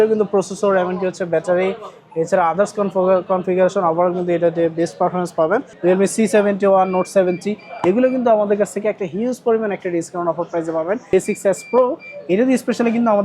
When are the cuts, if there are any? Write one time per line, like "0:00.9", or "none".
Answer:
0:05.7
0:11.1

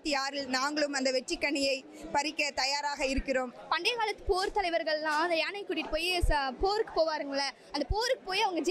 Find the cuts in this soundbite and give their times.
0:03.5

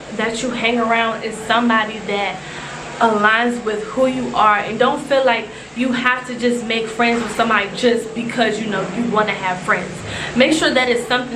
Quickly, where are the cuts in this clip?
none

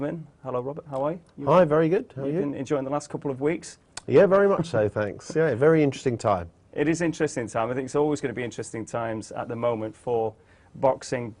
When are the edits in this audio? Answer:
0:01.9

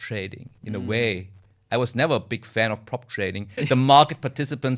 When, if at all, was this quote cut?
0:03.5

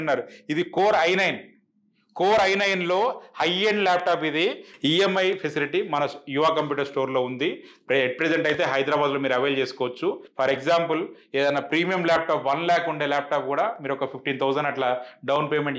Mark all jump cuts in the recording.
0:04.7
0:10.3

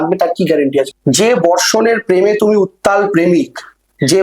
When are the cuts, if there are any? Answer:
0:00.9

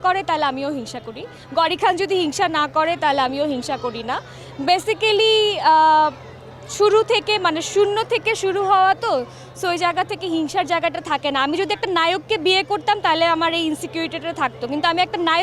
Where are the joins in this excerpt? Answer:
none

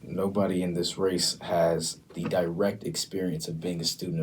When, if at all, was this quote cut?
0:02.0

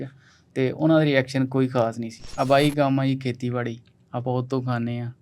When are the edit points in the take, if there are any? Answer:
0:02.3

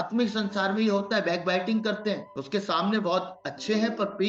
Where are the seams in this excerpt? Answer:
0:02.3

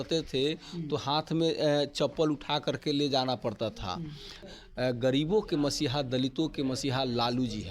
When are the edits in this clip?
0:04.5

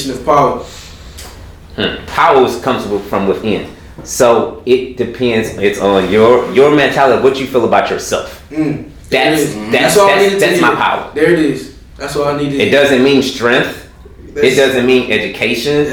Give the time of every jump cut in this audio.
0:02.0

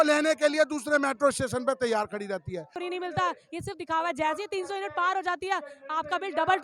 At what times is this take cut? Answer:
0:02.7

